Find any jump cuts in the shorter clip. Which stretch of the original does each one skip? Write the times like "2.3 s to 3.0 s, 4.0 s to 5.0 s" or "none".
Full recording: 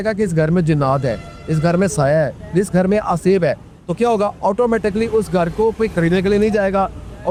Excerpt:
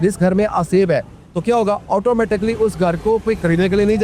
none